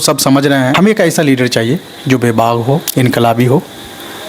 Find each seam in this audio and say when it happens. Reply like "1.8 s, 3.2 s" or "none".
0.7 s, 2.9 s